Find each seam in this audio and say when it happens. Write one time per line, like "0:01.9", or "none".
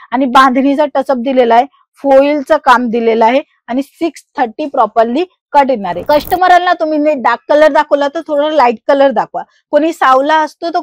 0:06.0